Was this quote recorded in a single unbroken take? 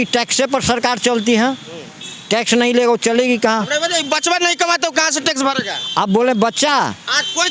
yes; 0 cuts

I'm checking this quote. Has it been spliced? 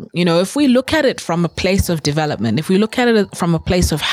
no; 0 cuts

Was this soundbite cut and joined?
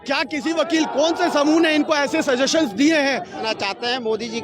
yes; 1 cut; at 3.4 s

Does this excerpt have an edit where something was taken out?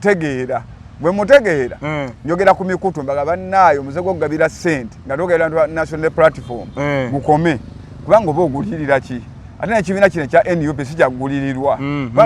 no; 0 cuts

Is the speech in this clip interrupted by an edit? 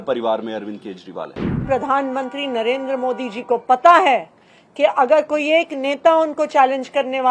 yes; 1 cut; at 1.5 s

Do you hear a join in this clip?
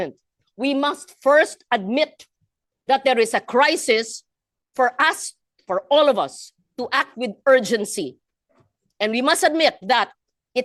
no; 0 cuts

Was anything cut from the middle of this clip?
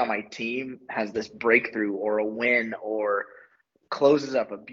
no; 0 cuts

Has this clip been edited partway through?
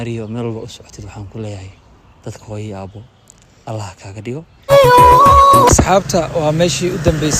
yes; 1 cut; at 4.7 s

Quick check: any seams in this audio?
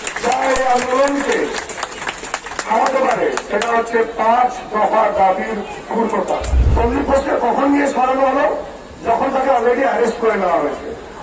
yes; 1 cut; at 6.6 s

